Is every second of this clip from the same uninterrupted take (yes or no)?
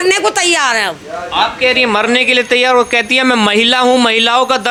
yes